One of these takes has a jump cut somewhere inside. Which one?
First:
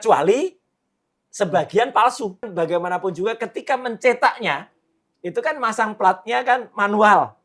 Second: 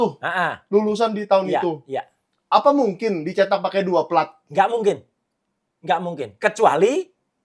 first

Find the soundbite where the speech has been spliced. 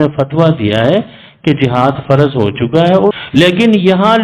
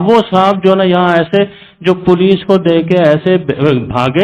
first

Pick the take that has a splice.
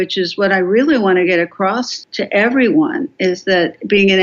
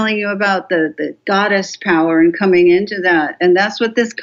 first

